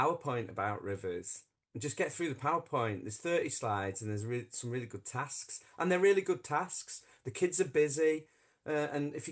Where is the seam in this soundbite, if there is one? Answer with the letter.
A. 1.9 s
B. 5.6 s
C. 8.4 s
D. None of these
D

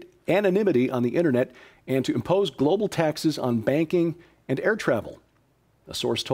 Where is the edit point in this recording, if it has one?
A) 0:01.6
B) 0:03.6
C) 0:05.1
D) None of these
C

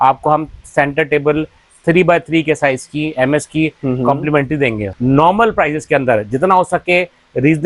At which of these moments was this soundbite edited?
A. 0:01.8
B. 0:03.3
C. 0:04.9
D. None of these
C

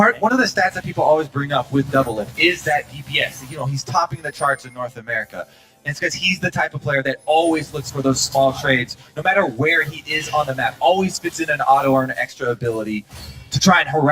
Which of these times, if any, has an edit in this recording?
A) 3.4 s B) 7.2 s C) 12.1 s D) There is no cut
C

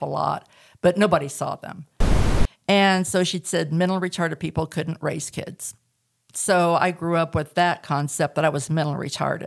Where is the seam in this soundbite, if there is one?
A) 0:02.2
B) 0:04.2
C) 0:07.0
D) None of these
A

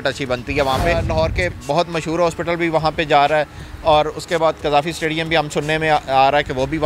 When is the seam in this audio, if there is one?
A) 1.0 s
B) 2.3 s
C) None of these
A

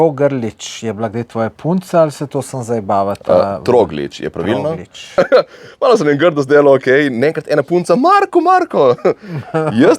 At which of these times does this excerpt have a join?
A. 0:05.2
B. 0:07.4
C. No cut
A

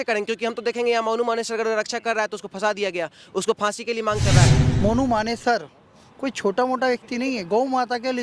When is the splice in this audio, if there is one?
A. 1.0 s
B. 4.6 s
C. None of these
B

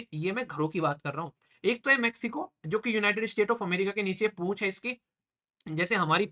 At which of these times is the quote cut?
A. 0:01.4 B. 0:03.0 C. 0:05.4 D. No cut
A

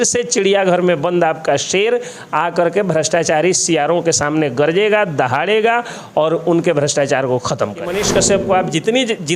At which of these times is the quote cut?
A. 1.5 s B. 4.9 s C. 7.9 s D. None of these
C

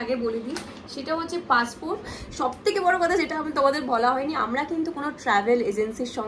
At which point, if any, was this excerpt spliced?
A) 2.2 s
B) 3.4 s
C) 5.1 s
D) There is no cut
A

